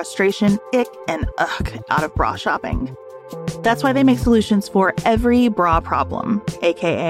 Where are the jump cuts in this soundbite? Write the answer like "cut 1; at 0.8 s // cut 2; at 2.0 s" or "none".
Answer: none